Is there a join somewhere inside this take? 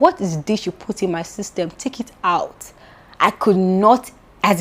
no; 0 cuts

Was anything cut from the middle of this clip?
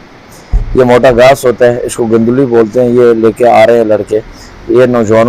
no; 0 cuts

